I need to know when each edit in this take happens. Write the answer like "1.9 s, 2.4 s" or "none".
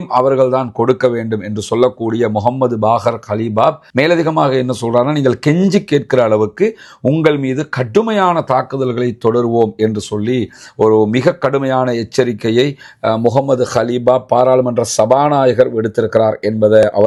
none